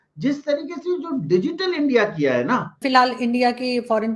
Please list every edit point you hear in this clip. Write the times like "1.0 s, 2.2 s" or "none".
2.8 s